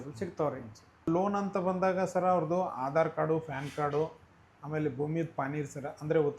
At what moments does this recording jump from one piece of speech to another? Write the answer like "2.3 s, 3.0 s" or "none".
1.1 s